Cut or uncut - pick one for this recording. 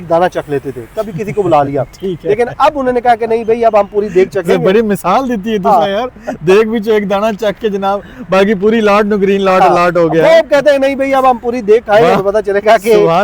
uncut